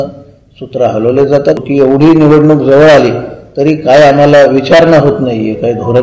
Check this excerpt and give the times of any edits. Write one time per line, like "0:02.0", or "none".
0:01.6